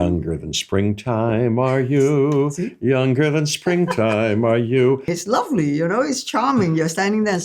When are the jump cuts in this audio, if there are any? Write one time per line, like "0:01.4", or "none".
0:05.0